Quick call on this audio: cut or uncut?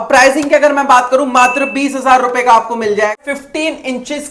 cut